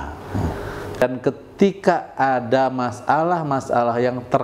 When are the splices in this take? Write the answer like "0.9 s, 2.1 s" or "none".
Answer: 1.0 s